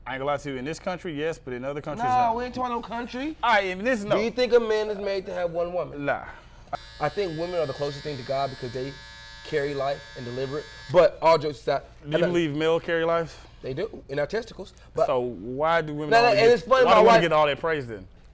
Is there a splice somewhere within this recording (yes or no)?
yes